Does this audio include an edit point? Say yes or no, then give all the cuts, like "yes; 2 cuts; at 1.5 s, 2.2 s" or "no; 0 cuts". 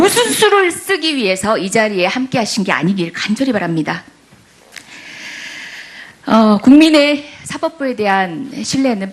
yes; 1 cut; at 6.6 s